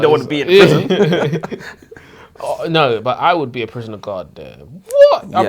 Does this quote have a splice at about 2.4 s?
no; 0 cuts

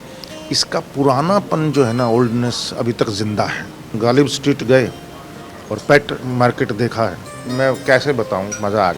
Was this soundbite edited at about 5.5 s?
no; 2 cuts; at 3.9 s, 7.5 s

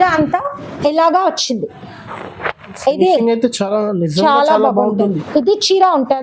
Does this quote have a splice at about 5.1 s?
yes; 1 cut; at 5.1 s

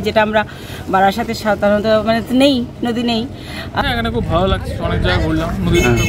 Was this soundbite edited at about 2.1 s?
no; 1 cut; at 3.8 s

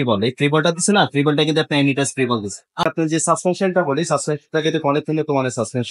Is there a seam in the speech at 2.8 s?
yes; 1 cut; at 2.8 s

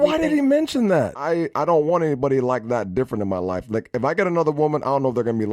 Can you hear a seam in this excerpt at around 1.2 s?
yes; 1 cut; at 1.2 s

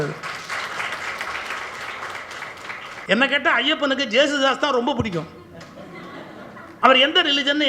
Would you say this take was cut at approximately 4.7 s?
no; 2 cuts; at 3.0 s, 6.8 s

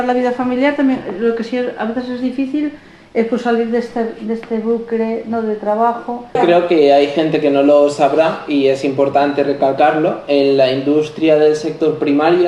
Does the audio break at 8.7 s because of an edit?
no; 1 cut; at 6.4 s

